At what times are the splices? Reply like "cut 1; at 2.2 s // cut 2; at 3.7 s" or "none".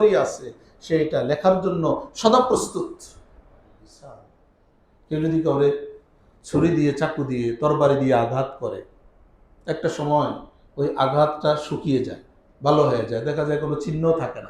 cut 1; at 4.3 s